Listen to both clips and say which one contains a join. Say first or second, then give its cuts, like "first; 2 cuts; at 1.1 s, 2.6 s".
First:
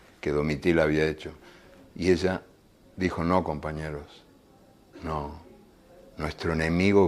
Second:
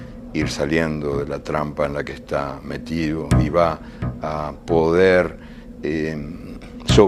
second; 1 cut; at 5.7 s